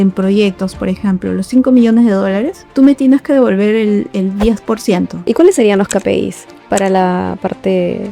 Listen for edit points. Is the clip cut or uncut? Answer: cut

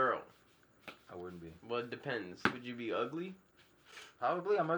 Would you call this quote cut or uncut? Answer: uncut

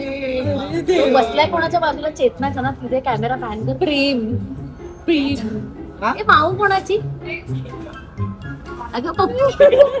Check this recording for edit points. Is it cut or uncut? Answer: uncut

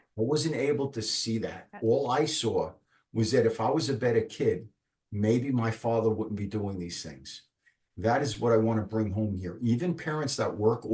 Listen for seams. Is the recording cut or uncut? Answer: uncut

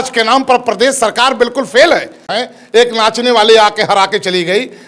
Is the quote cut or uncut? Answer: cut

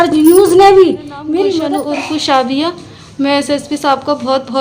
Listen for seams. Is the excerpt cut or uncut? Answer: cut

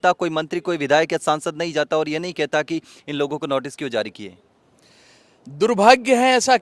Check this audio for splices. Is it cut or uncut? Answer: uncut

